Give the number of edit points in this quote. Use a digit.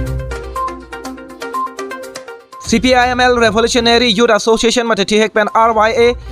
1